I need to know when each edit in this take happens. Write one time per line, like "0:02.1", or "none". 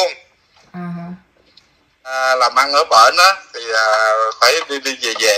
0:02.3